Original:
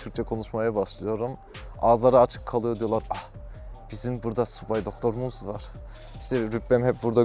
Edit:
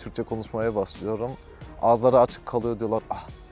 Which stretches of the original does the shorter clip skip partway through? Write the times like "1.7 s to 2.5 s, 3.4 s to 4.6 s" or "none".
none